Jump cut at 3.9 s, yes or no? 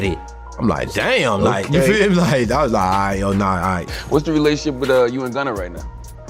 yes